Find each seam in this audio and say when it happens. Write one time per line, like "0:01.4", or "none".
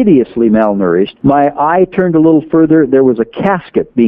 0:01.1